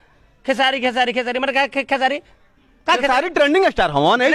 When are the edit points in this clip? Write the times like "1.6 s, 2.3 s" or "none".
none

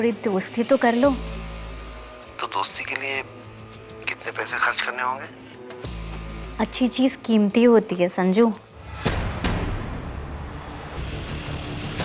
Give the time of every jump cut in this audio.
11.0 s

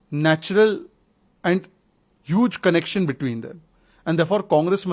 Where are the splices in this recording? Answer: none

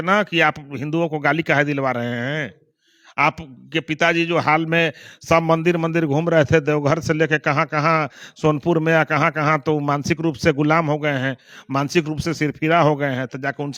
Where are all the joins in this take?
none

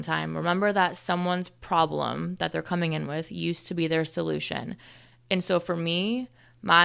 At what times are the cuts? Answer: none

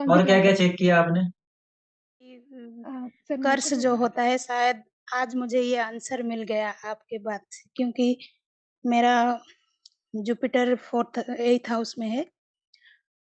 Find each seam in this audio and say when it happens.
3.4 s

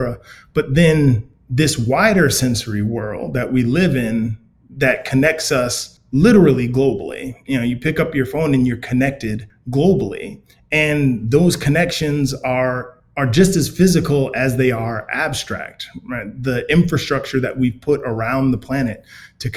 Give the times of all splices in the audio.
none

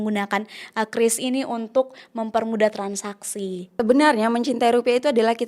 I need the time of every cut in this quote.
3.7 s

